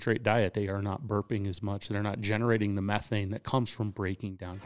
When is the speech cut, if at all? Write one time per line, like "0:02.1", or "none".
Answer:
none